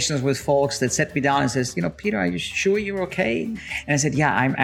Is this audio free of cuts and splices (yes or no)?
no